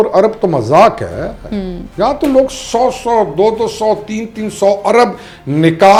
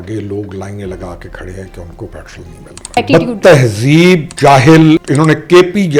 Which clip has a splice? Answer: second; 3 cuts; at 2.9 s, 4.3 s, 5.1 s

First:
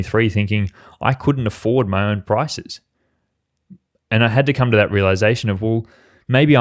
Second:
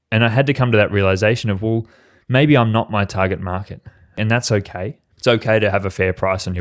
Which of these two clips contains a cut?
second; 2 cuts; at 4.2 s, 5.0 s

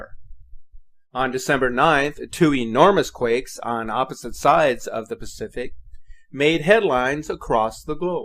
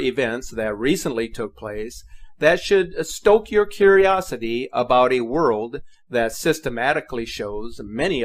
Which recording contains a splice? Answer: second; 1 cut; at 6.3 s

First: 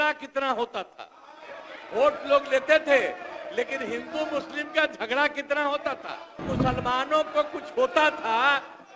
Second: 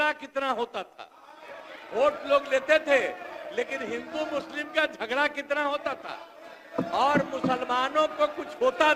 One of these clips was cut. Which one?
first; 1 cut; at 6.5 s

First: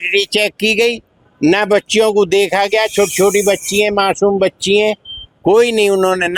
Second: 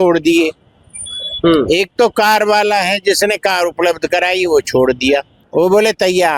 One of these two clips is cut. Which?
second; 1 cut; at 5.4 s

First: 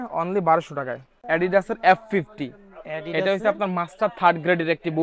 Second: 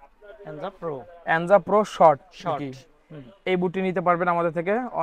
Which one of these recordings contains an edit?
first; 1 cut; at 1.1 s

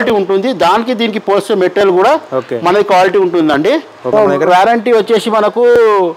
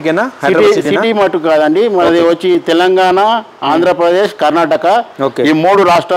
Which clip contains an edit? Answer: first; 1 cut; at 4.1 s

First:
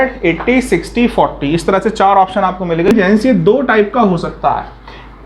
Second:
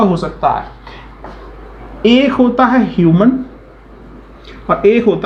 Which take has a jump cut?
first; 1 cut; at 2.9 s

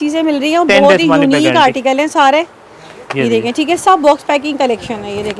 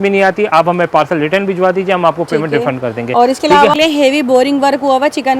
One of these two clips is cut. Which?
second; 1 cut; at 3.7 s

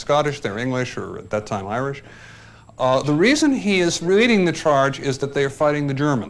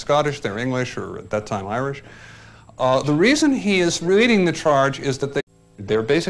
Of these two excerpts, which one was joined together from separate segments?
first; 1 cut; at 5.4 s

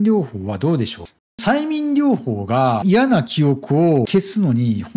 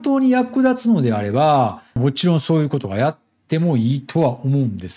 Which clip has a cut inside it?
first; 3 cuts; at 1.0 s, 2.8 s, 4.1 s

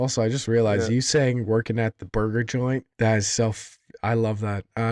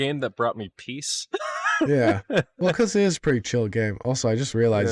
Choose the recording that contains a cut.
first; 1 cut; at 2.9 s

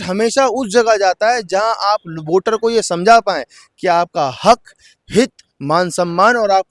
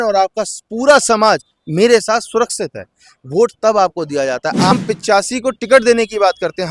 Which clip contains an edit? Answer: second; 1 cut; at 4.7 s

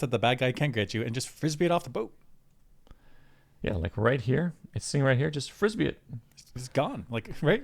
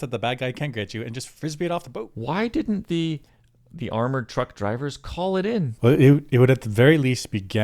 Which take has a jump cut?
second; 2 cuts; at 2.1 s, 5.7 s

